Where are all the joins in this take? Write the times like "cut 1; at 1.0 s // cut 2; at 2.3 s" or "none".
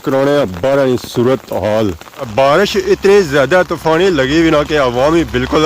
cut 1; at 2.1 s